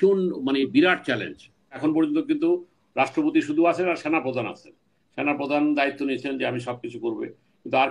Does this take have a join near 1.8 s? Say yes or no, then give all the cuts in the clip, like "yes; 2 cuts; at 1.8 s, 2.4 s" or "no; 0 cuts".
yes; 1 cut; at 1.8 s